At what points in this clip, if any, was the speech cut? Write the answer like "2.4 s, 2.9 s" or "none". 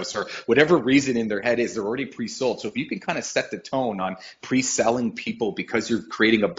none